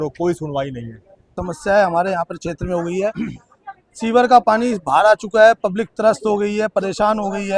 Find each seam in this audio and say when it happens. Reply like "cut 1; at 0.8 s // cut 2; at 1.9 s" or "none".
cut 1; at 1.3 s